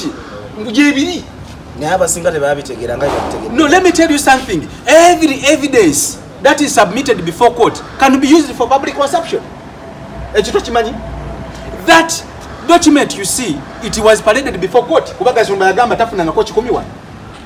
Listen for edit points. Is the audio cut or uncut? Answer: uncut